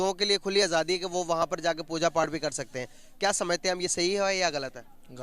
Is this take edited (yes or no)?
no